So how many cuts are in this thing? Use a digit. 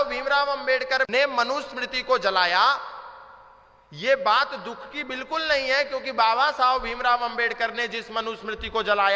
1